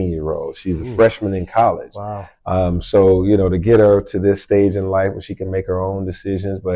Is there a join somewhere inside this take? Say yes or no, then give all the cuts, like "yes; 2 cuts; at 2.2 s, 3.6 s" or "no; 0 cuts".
no; 0 cuts